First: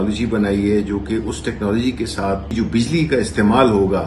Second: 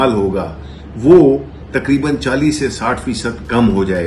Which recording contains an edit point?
first; 1 cut; at 2.5 s

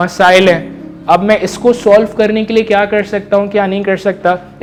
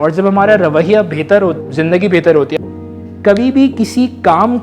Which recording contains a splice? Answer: second; 2 cuts; at 1.6 s, 2.5 s

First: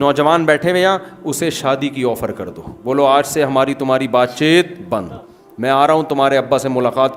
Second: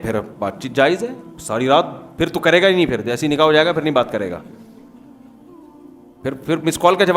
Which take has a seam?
second; 2 cuts; at 4.4 s, 6.0 s

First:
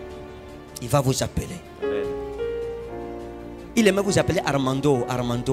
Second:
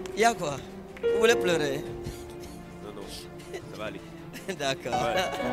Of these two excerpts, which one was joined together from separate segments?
first; 1 cut; at 3.5 s

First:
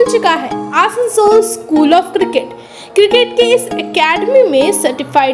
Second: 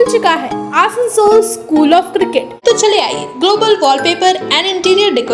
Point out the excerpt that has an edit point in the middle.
second; 1 cut; at 2.5 s

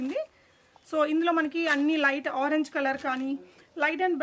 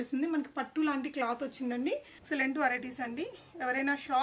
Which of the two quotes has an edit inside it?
second; 1 cut; at 2.1 s

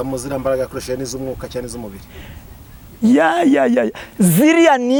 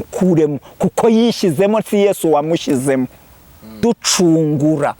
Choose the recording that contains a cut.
second; 1 cut; at 3.8 s

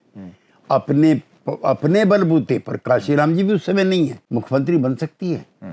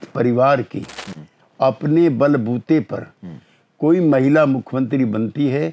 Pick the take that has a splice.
first; 1 cut; at 4.2 s

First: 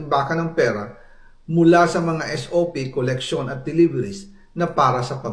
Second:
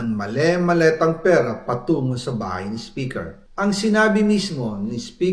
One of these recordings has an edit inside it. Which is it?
second; 1 cut; at 3.4 s

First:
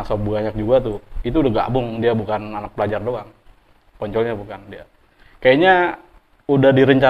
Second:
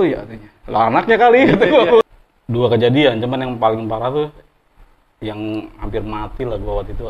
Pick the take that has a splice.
second; 1 cut; at 2.0 s

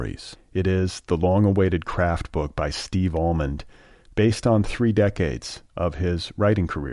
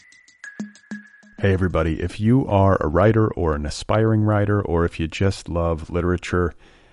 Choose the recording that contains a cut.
second; 1 cut; at 0.9 s

